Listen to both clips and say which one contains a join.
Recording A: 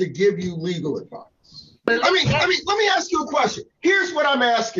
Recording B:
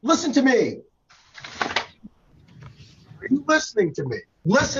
A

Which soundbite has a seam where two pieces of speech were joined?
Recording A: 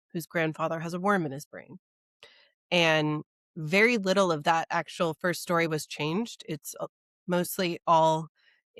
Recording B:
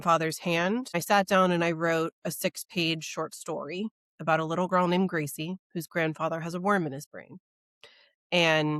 B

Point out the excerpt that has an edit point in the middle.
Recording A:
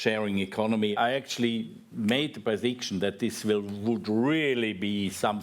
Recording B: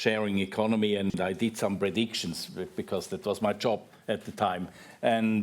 A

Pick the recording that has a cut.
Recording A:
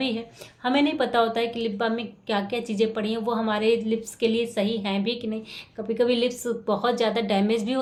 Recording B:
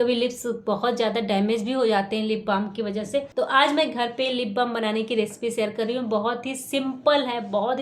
B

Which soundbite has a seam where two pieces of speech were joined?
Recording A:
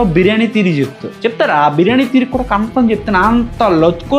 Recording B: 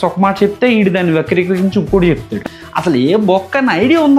B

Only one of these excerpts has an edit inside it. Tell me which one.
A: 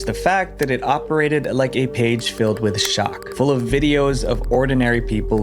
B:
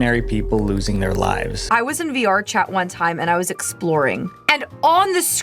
B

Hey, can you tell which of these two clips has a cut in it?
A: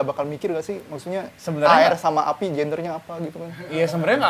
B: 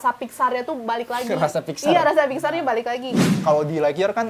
B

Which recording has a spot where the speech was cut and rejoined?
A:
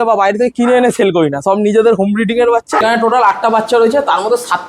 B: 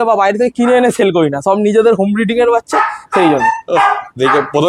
A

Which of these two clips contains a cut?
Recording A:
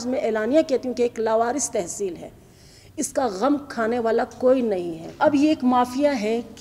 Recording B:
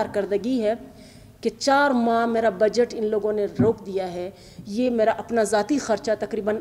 A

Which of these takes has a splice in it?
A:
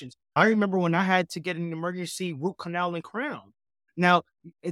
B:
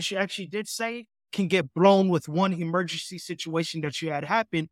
A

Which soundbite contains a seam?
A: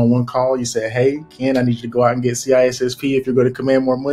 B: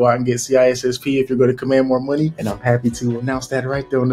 B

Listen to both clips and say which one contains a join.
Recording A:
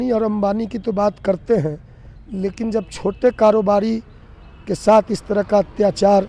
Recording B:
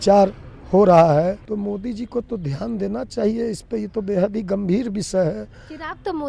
B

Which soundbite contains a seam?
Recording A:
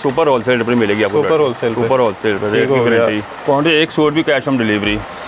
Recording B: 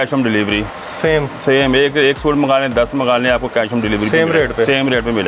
A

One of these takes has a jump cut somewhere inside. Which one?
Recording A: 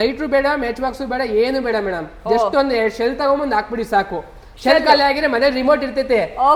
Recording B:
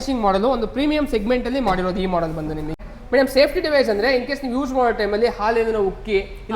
B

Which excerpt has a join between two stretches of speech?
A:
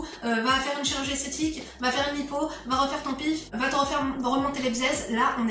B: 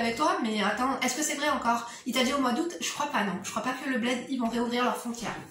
A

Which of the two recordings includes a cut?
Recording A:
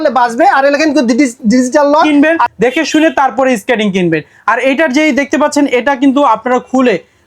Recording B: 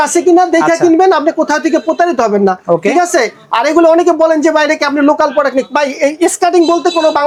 A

